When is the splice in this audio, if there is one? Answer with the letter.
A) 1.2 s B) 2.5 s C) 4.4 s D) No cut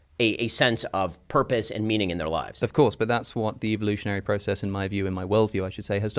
B